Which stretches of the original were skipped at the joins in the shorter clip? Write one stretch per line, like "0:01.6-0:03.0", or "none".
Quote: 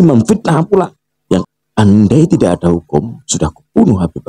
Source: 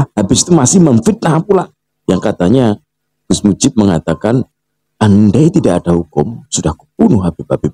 0:02.2-0:04.7